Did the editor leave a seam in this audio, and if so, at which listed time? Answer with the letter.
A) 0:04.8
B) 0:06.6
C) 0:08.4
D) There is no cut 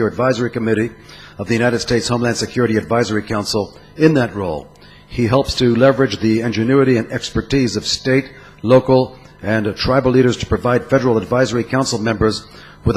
C